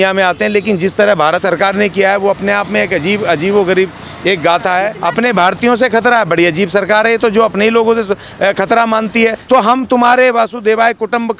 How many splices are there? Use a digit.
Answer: 3